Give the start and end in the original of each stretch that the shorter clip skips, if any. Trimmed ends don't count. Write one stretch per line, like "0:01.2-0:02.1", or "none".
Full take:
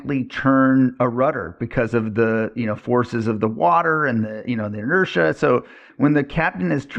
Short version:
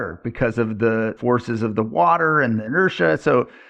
0:02.5-0:02.8
0:04.3-0:04.8